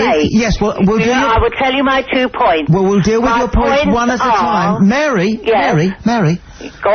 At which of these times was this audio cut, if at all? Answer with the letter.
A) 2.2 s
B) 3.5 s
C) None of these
B